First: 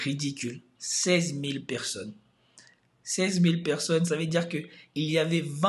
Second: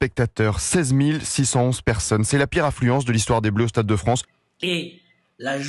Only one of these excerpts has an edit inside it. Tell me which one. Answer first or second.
second